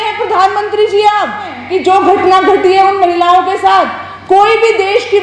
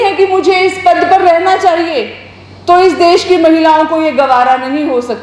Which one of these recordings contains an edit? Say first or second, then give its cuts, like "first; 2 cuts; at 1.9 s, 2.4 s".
first; 1 cut; at 1.6 s